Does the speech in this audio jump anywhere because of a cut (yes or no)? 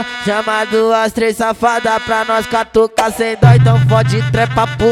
no